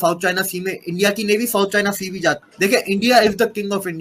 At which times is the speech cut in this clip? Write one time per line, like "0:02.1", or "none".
0:02.5